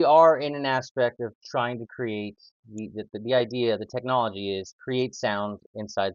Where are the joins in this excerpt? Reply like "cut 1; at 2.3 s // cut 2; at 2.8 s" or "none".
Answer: none